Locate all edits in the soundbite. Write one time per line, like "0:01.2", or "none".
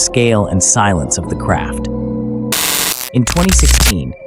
0:02.6